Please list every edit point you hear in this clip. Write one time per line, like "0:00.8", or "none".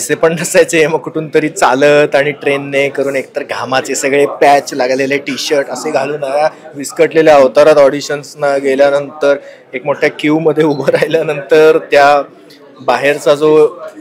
none

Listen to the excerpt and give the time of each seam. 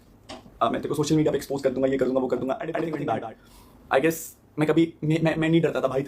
0:02.8

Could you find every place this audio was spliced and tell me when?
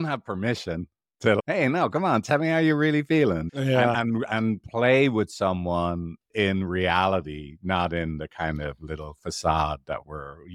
none

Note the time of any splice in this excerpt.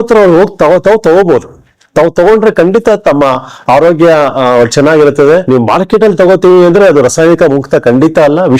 0:05.4

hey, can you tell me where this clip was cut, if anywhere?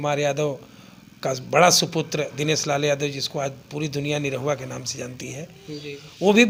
none

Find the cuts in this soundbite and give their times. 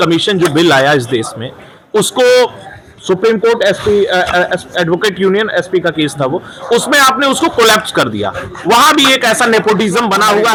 none

